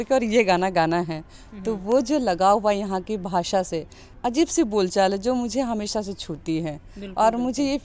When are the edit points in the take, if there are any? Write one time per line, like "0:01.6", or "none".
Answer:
0:04.0
0:06.6